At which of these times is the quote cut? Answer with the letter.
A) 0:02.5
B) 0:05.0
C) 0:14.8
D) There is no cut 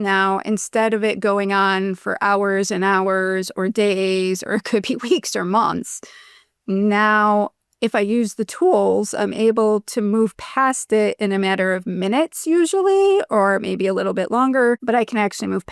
C